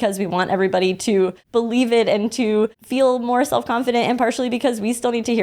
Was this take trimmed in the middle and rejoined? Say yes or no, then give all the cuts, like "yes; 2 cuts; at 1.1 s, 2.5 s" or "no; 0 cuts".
yes; 2 cuts; at 1.4 s, 2.8 s